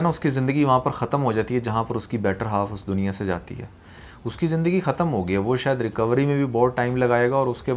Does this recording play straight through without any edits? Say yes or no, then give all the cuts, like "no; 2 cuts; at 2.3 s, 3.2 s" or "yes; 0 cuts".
yes; 0 cuts